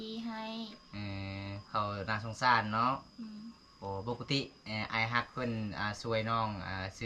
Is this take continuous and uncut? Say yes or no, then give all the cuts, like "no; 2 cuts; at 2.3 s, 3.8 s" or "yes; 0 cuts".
yes; 0 cuts